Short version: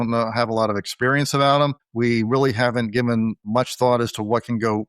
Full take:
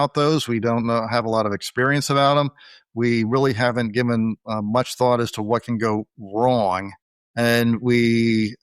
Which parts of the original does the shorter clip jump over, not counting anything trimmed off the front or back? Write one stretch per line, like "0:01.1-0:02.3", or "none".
0:02.6-0:02.8
0:04.4-0:04.6